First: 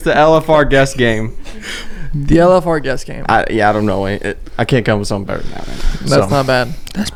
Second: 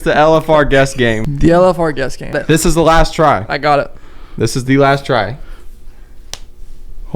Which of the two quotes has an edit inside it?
second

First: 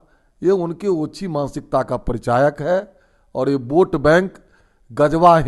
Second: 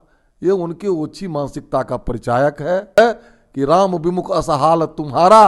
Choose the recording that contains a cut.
second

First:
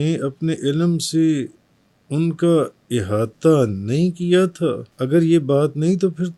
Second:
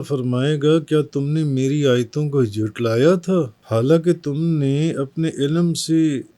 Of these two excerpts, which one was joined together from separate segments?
first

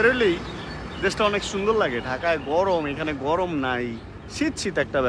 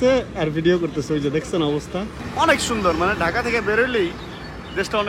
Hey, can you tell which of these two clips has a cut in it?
second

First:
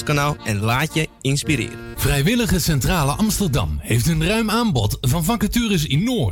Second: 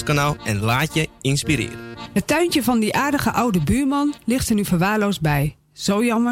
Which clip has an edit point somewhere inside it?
second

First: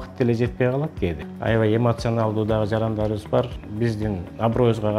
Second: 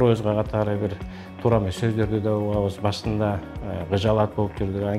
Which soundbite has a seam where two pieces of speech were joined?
first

